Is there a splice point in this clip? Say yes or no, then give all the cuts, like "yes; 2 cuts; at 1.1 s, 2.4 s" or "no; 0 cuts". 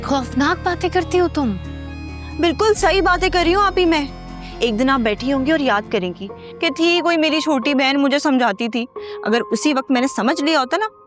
no; 0 cuts